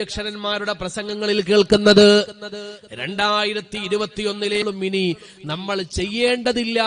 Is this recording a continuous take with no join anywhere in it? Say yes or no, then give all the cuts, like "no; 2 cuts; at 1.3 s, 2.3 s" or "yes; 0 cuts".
no; 1 cut; at 4.6 s